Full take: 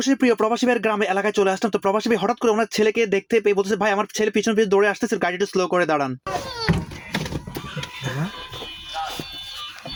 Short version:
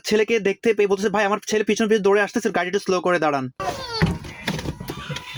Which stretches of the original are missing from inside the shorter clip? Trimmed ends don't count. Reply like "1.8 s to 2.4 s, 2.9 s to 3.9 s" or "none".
none

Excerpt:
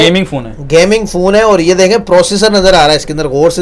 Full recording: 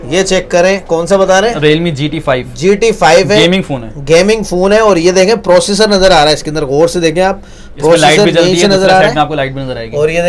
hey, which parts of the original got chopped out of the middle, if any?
none

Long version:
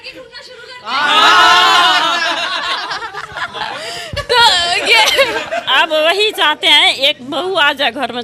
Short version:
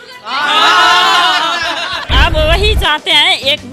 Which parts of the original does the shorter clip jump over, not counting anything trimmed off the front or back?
2.7 s to 5.6 s

